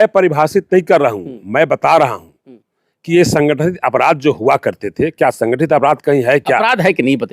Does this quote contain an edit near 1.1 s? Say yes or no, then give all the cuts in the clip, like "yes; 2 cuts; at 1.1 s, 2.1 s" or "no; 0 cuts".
no; 1 cut; at 6.3 s